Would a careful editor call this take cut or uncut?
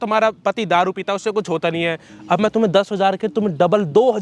uncut